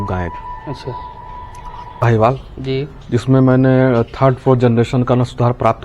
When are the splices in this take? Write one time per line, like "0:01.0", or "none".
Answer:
0:02.0

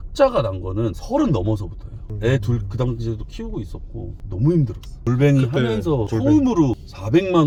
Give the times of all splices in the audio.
none

